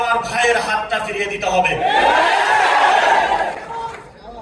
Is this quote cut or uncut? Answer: uncut